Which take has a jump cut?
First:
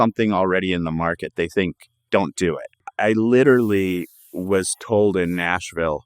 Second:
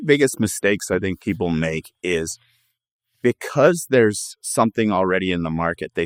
first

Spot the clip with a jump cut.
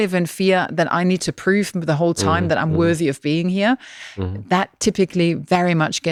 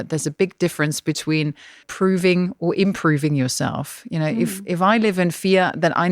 second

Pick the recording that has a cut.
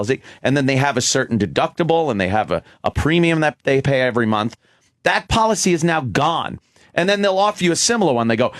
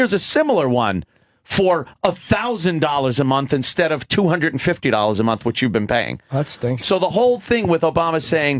first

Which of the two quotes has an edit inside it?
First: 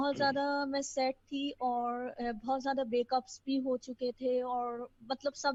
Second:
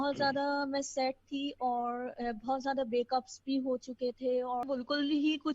second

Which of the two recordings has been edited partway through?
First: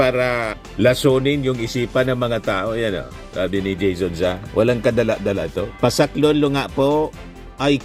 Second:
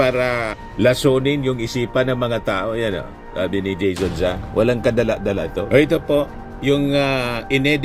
second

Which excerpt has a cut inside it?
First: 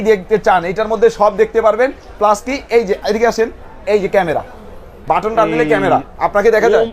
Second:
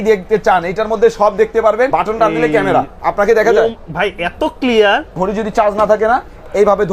second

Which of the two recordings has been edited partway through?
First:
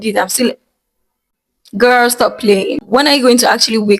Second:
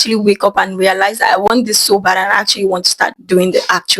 first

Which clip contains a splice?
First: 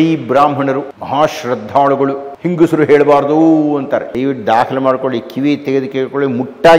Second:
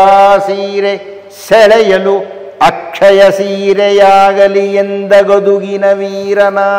first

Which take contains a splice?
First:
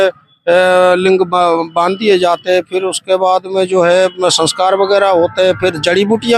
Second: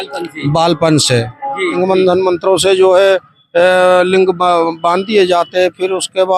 second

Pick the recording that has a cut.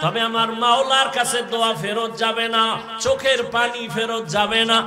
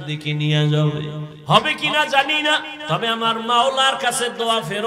second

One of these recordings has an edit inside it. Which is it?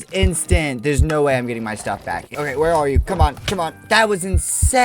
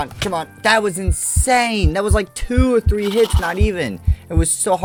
first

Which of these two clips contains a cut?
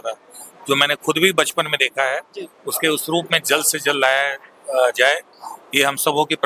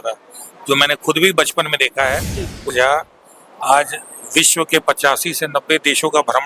second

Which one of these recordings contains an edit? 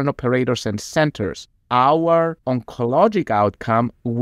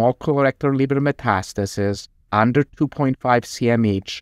first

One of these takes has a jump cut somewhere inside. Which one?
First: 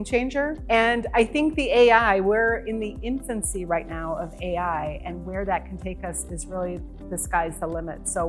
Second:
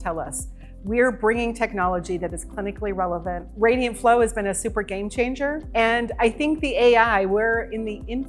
second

